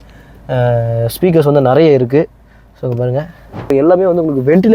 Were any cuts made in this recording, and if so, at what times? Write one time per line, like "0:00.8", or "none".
0:03.7

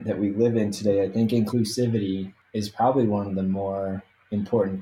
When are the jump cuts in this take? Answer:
0:01.5
0:02.4

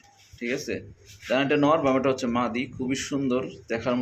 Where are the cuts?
none

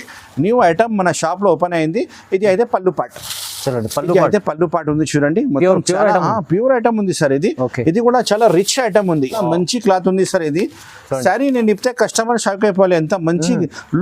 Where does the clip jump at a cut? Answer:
0:09.4

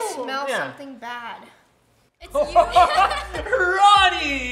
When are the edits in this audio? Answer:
none

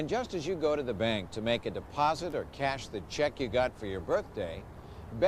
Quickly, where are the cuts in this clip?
0:01.9

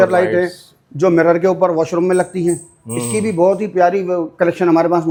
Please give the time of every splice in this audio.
none

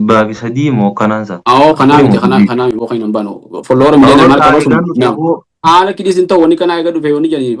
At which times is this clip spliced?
0:05.6

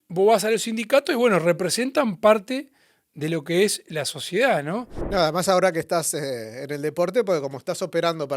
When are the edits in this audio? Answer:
0:05.0

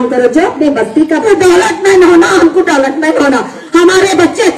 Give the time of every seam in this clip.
0:01.2

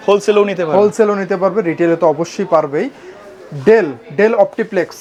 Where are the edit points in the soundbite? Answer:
none

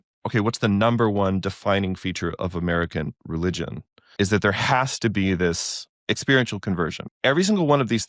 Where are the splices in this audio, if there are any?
0:04.1
0:05.9
0:07.0

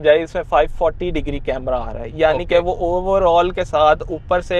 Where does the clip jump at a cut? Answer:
none

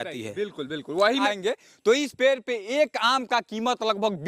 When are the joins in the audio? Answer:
0:01.2

